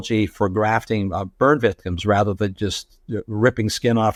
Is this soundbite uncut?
yes; 0 cuts

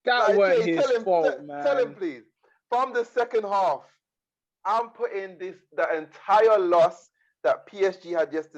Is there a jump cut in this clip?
no; 0 cuts

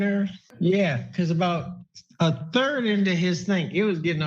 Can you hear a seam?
no; 0 cuts

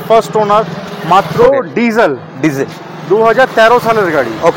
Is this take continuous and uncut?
no; 1 cut; at 1.5 s

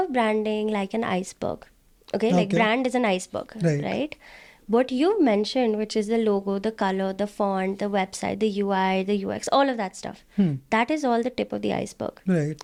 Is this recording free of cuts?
yes; 0 cuts

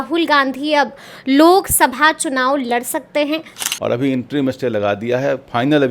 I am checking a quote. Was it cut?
yes; 1 cut; at 3.6 s

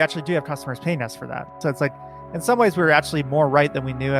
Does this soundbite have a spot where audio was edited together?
yes; 1 cut; at 1.5 s

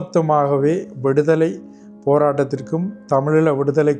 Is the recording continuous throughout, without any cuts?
yes; 0 cuts

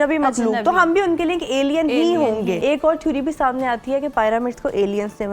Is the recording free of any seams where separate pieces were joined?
no; 1 cut; at 2.6 s

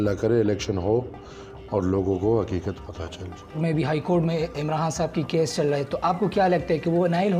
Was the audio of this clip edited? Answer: yes; 1 cut; at 3.6 s

